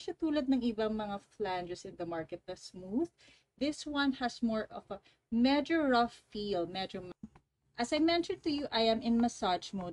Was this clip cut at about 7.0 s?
yes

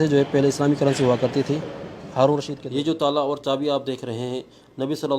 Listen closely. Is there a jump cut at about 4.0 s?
no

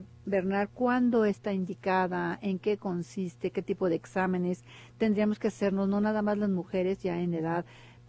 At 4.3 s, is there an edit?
yes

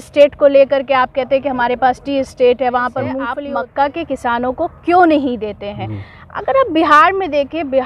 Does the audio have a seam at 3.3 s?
yes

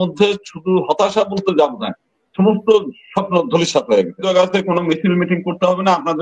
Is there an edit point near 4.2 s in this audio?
yes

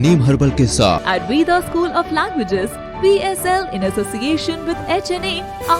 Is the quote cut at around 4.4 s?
no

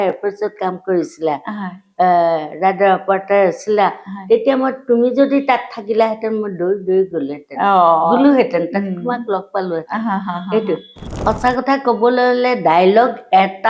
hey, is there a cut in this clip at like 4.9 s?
no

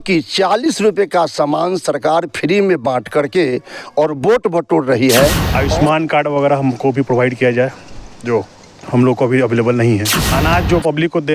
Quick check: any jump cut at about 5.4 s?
yes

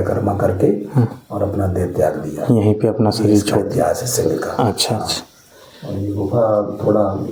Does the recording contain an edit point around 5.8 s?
no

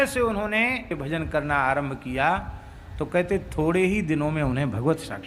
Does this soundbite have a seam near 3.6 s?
no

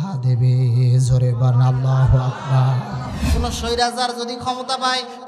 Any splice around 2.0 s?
no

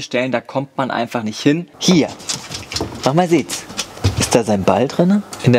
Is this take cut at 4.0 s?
yes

